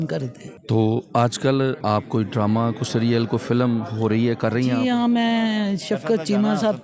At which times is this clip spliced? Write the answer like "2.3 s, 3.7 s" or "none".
1.8 s